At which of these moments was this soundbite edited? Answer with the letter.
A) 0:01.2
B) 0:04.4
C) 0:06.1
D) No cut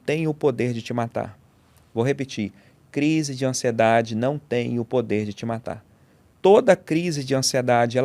D